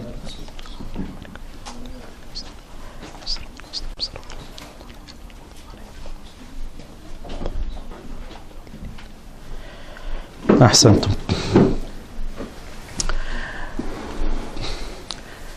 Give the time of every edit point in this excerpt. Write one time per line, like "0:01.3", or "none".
0:02.3

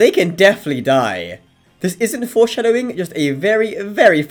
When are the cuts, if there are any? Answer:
none

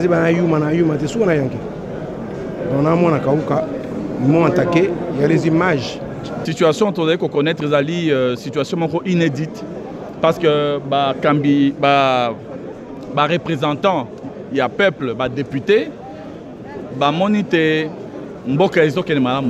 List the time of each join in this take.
0:06.4

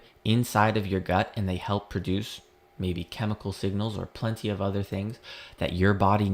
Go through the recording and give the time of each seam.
none

